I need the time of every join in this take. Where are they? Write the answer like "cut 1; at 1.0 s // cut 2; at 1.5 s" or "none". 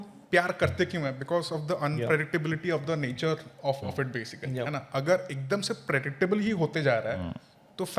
none